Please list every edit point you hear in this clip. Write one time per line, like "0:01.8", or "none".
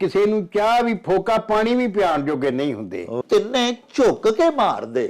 0:03.2